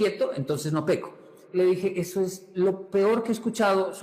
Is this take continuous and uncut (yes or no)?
no